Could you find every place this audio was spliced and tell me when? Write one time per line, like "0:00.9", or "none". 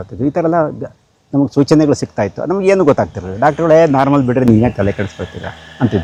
none